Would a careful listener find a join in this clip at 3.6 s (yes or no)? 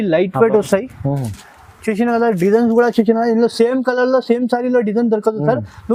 no